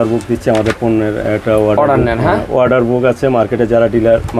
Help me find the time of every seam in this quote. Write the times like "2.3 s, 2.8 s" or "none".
none